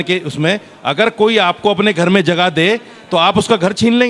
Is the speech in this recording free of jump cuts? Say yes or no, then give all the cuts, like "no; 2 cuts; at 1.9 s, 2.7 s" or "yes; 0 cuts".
yes; 0 cuts